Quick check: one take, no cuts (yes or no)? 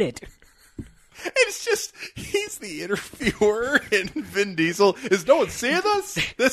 no